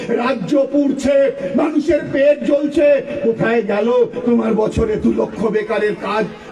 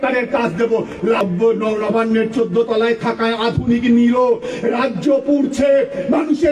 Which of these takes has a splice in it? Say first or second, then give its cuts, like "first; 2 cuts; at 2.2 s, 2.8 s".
second; 1 cut; at 1.2 s